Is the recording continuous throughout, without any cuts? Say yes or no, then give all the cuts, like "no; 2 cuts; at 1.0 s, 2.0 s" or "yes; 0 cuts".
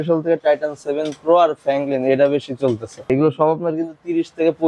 no; 1 cut; at 3.1 s